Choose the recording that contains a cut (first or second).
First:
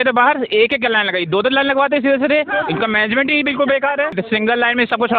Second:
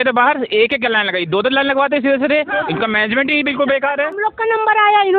first